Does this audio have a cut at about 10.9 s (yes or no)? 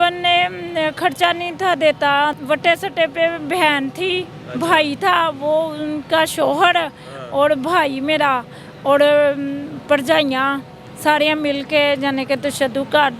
no